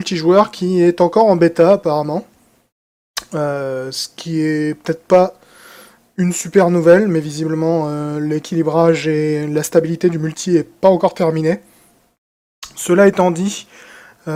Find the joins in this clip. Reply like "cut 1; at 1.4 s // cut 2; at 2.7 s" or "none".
none